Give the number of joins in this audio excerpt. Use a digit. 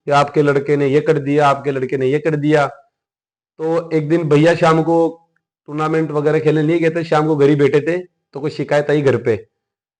0